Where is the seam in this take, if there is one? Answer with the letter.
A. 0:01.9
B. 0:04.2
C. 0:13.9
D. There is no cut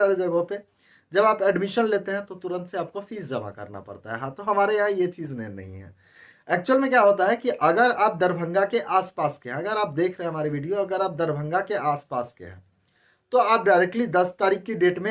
D